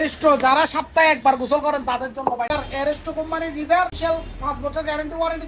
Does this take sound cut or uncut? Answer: cut